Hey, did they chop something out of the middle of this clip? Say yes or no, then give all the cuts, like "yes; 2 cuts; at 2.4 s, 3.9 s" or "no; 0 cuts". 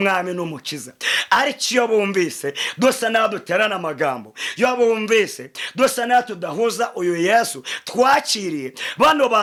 no; 0 cuts